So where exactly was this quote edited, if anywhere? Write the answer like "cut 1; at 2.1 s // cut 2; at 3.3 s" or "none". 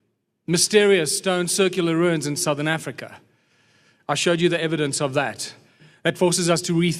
cut 1; at 3.4 s

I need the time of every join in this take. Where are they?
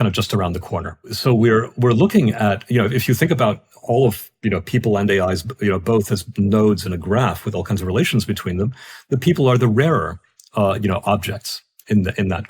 cut 1; at 1.1 s

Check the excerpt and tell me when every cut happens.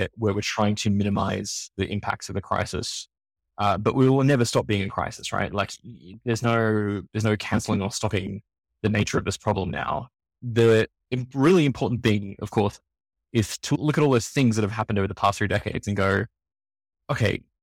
cut 1; at 10.4 s // cut 2; at 13.8 s

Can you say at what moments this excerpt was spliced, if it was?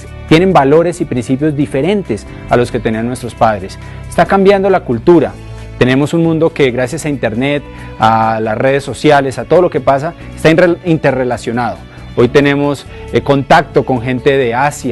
cut 1; at 9.4 s

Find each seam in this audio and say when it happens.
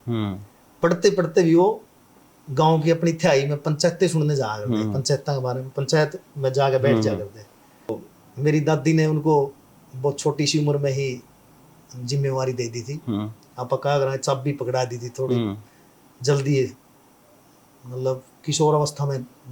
cut 1; at 8.1 s

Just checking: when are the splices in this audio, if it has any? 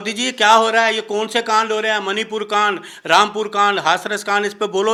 none

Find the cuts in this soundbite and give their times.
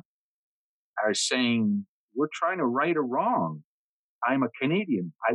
cut 1; at 2.0 s // cut 2; at 4.0 s

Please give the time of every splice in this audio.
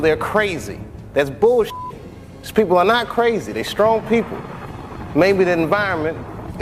none

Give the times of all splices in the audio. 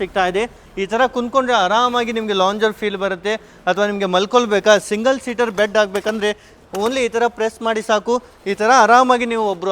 none

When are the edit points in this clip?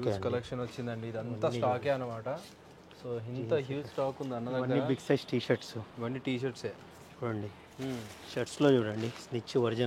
none

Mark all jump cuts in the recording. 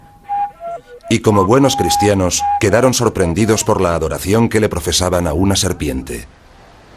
cut 1; at 3.6 s

